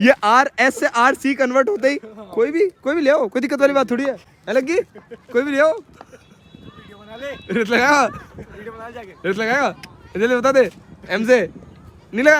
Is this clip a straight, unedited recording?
yes; 0 cuts

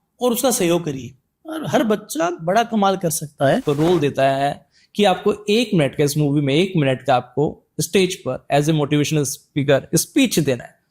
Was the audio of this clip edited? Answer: yes; 1 cut; at 3.6 s

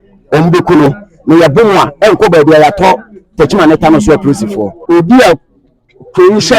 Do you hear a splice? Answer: yes; 1 cut; at 4.7 s

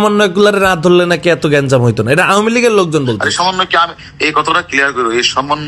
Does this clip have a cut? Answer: no; 0 cuts

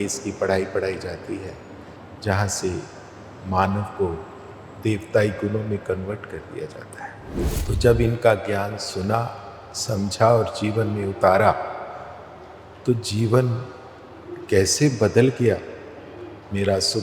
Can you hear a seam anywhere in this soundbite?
yes; 1 cut; at 7.4 s

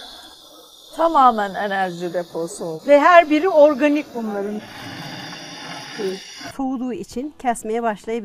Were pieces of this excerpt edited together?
yes; 1 cut; at 6.5 s

